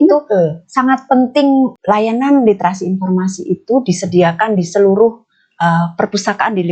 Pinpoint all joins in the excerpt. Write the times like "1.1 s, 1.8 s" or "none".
1.8 s